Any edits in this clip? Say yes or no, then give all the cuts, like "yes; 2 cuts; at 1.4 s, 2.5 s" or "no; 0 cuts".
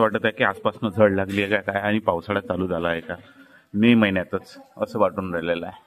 no; 0 cuts